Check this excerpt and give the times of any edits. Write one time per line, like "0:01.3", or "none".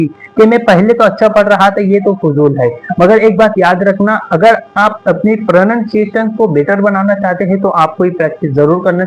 none